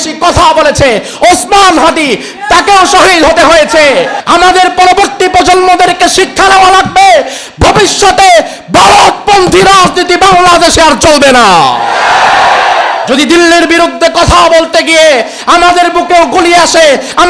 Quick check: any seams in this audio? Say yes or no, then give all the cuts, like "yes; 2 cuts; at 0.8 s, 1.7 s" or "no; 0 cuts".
yes; 1 cut; at 4.2 s